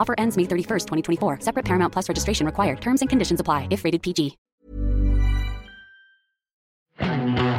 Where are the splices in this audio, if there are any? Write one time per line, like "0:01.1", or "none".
0:06.6